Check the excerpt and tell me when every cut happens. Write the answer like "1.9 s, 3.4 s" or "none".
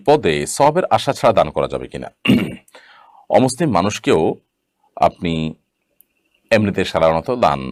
none